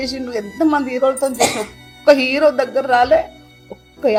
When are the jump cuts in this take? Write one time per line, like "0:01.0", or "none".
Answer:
none